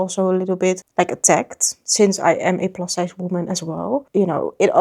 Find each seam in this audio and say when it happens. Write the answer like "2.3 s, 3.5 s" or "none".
none